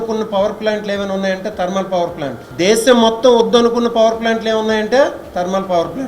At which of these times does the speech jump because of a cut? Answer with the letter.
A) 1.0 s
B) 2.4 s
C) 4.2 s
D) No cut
B